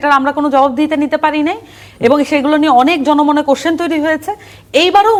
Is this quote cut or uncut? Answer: uncut